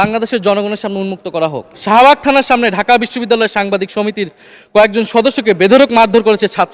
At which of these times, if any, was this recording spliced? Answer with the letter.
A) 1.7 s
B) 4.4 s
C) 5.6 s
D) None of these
A